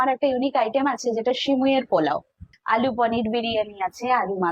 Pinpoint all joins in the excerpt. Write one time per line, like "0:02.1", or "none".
0:02.5